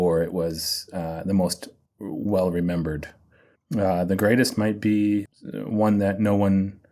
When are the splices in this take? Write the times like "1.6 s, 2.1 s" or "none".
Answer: 5.3 s